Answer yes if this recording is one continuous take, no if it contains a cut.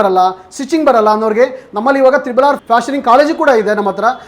no